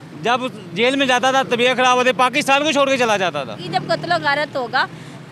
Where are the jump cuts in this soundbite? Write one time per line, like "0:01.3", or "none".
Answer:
0:03.6